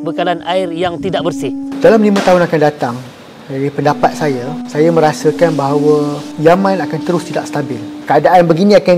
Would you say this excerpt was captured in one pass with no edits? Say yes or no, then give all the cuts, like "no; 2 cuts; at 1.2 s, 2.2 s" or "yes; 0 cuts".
no; 4 cuts; at 1.7 s, 4.6 s, 6.2 s, 7.9 s